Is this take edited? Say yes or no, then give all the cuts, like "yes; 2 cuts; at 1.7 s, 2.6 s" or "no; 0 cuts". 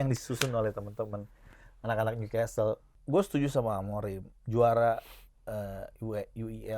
yes; 1 cut; at 2.9 s